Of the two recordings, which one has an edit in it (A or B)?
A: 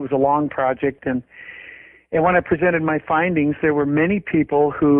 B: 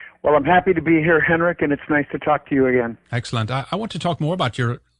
A